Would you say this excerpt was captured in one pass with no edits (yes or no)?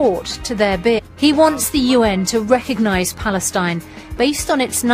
yes